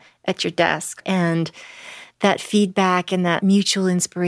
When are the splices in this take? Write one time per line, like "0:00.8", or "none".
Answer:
0:01.0
0:03.4